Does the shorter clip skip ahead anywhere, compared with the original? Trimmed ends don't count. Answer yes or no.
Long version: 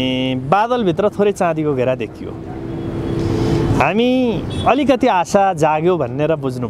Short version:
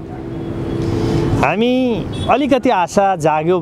no